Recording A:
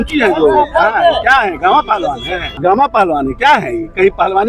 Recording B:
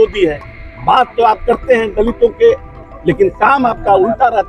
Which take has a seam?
A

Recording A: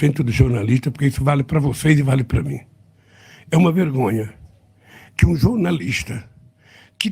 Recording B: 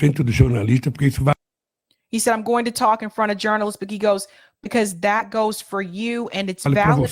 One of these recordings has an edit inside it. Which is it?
A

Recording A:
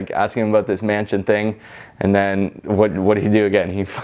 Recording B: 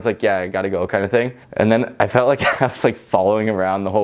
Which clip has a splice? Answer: B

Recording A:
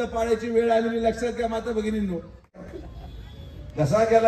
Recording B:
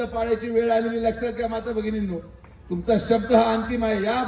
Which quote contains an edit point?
A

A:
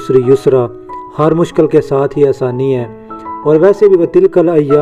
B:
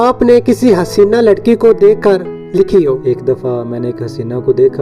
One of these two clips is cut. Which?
B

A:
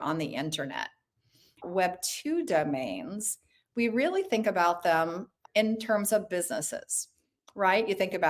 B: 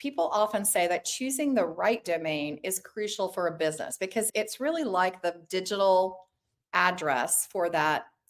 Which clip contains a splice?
A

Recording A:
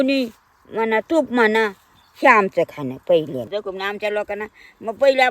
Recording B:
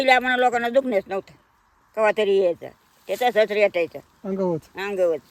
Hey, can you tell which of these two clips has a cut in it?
A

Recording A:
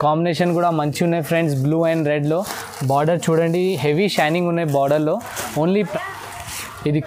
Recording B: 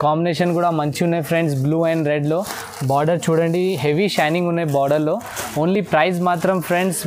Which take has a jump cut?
A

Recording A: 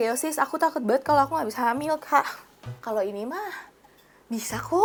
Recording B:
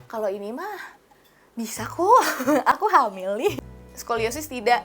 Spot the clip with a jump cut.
B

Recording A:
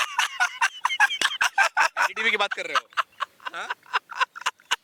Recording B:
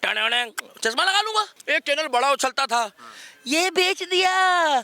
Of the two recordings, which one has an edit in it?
B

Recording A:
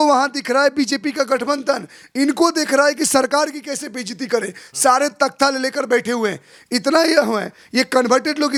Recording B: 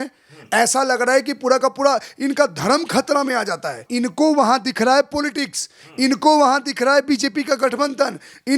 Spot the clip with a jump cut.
B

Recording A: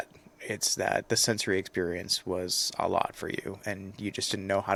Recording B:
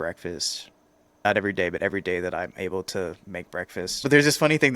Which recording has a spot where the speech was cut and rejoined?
B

